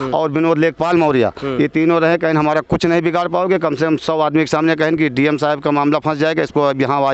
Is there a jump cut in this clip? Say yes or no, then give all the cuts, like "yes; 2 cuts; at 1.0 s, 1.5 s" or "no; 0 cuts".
no; 0 cuts